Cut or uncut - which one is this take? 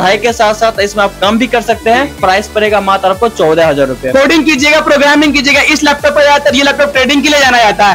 cut